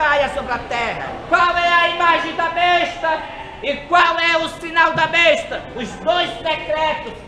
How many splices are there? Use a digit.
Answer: 1